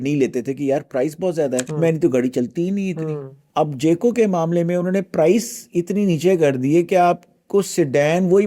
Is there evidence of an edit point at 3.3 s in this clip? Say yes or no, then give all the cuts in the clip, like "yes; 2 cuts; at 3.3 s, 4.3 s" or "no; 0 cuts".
yes; 2 cuts; at 1.7 s, 3.3 s